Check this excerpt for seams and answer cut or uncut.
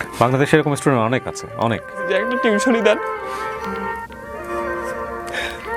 cut